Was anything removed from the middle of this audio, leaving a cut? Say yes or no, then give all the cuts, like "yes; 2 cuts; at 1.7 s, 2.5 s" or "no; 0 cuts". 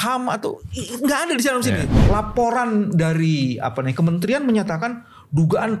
yes; 1 cut; at 1.9 s